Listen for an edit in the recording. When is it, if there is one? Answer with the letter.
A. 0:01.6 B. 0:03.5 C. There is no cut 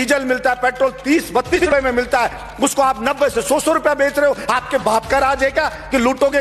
A